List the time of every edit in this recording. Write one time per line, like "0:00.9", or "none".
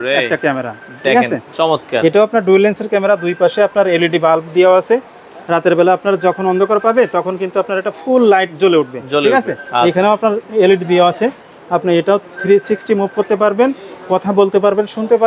none